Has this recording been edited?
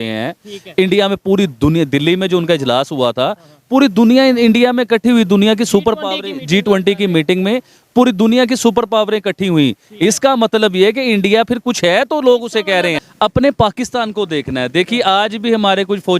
yes; 1 cut; at 13.0 s

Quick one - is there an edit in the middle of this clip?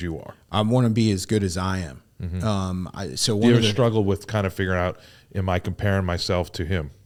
no; 0 cuts

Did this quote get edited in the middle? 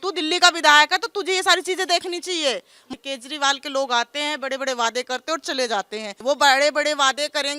yes; 2 cuts; at 2.9 s, 6.1 s

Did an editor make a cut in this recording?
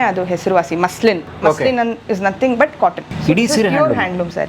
yes; 1 cut; at 3.1 s

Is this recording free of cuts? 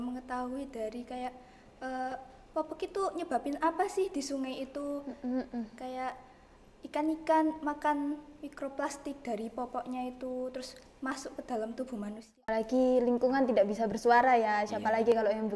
no; 1 cut; at 12.3 s

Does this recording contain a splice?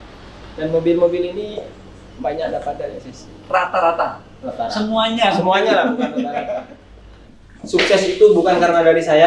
yes; 1 cut; at 7.2 s

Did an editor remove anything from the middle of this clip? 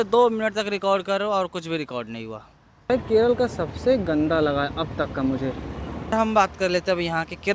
yes; 2 cuts; at 2.9 s, 6.1 s

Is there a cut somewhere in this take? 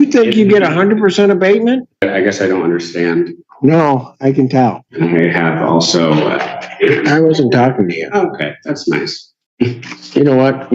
yes; 2 cuts; at 2.0 s, 4.9 s

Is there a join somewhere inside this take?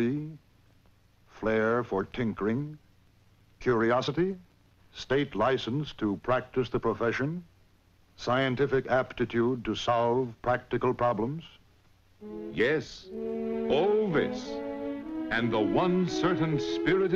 no; 0 cuts

